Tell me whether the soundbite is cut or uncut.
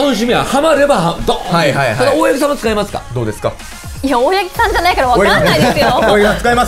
cut